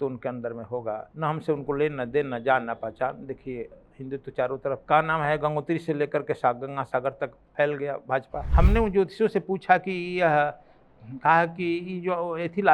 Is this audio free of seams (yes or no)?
no